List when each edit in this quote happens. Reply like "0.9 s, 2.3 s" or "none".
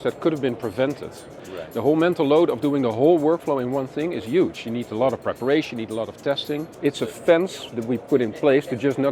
1.3 s, 6.7 s

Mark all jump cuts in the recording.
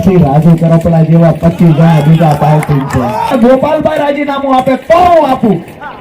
3.3 s

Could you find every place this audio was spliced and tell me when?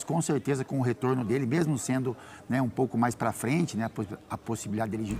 none

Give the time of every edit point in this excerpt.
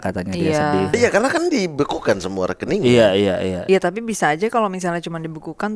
0.9 s, 3.6 s

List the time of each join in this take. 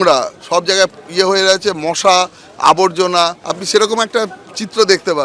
3.4 s

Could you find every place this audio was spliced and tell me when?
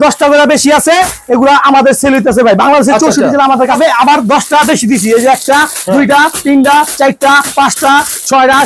3.8 s

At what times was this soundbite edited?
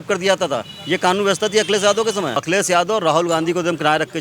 2.4 s

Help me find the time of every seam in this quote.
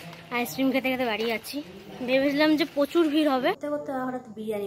3.6 s

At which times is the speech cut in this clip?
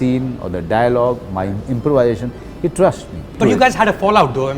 3.4 s

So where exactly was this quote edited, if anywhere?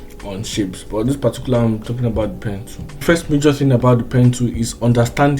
3.0 s

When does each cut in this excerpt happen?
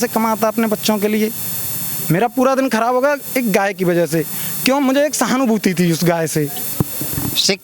6.7 s

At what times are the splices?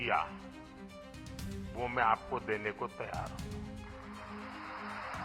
none

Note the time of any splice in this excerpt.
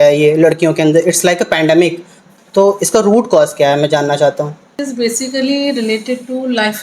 2.2 s, 4.7 s

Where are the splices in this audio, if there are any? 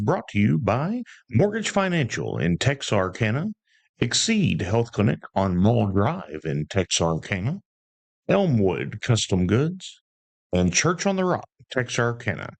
none

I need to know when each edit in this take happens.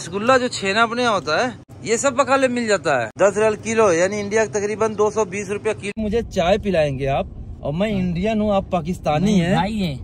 1.7 s, 3.1 s, 5.8 s

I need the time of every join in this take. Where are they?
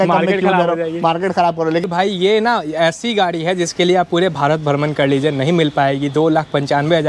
1.8 s

